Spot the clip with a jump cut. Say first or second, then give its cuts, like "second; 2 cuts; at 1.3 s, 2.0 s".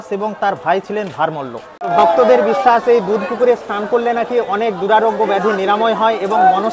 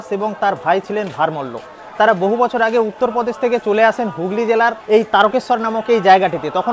first; 1 cut; at 1.9 s